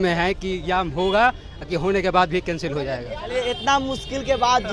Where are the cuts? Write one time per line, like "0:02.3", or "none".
0:03.2